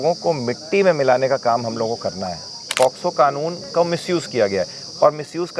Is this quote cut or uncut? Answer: cut